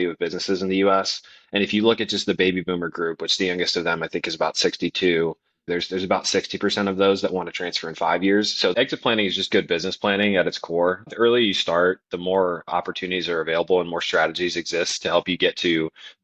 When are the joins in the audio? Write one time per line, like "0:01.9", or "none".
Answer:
0:05.7
0:08.7
0:11.1
0:12.7